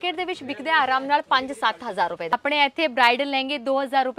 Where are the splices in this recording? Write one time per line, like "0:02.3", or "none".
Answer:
0:02.3